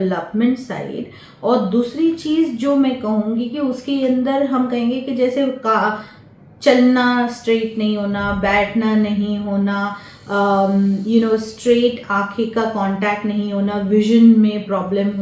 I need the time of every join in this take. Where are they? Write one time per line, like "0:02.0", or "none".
none